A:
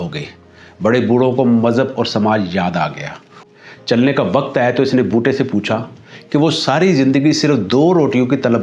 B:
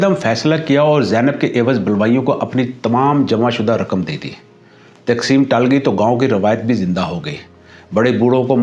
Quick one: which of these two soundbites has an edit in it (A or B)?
A